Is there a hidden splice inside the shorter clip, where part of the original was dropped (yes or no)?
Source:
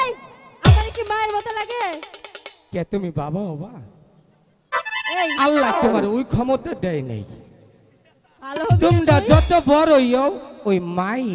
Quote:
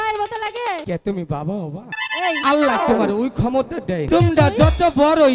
yes